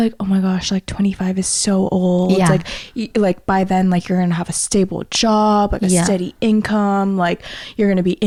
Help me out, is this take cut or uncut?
uncut